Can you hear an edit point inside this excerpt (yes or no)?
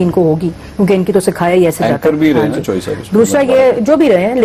no